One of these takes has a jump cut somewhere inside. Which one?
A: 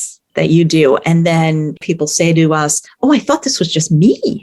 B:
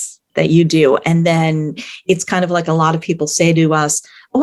A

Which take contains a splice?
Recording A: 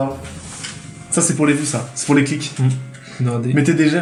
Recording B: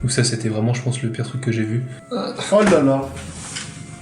B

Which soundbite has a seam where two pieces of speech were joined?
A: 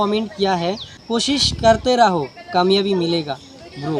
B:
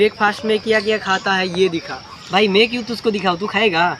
A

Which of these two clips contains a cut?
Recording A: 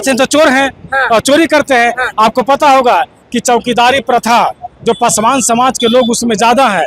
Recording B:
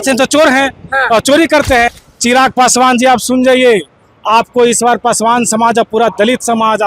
B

